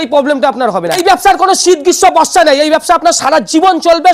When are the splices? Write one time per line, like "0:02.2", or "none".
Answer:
0:00.9